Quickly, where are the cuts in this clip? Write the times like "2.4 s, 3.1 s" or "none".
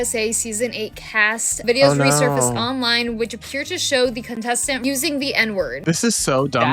1.6 s, 4.8 s, 5.8 s